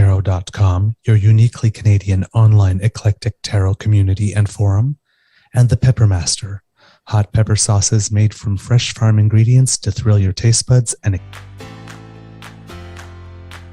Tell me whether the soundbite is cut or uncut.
cut